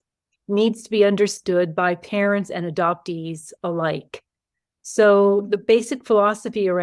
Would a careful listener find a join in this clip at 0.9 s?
no; 0 cuts

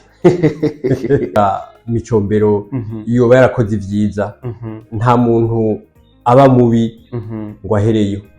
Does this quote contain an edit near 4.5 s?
no; 1 cut; at 1.4 s

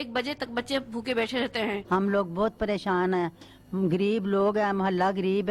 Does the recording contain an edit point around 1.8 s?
yes; 1 cut; at 1.8 s

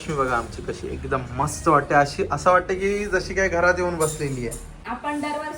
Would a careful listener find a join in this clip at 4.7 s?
yes; 1 cut; at 4.7 s

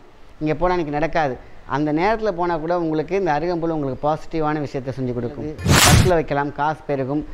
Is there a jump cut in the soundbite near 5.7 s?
yes; 1 cut; at 5.7 s

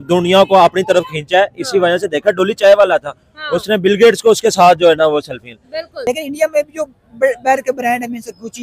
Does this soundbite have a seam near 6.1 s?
yes; 1 cut; at 6.1 s

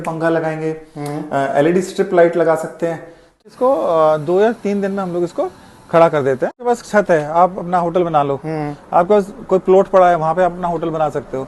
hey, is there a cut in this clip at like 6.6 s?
yes; 2 cuts; at 3.4 s, 6.6 s

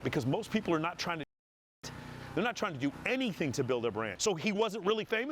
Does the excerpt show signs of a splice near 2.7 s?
no; 1 cut; at 4.1 s

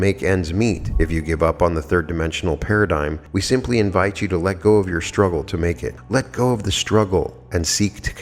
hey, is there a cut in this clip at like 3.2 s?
yes; 3 cuts; at 0.9 s, 3.2 s, 5.9 s

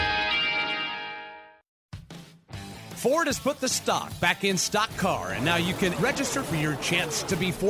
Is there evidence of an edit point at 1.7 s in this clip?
yes; 1 cut; at 1.7 s

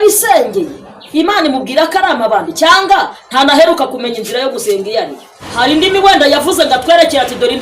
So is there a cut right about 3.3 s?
no; 1 cut; at 5.4 s

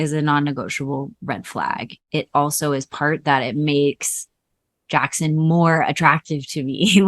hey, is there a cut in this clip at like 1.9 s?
yes; 1 cut; at 1.9 s

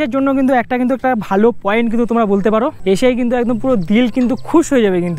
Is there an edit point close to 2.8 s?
yes; 1 cut; at 2.8 s

